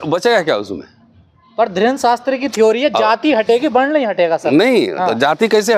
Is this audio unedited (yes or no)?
yes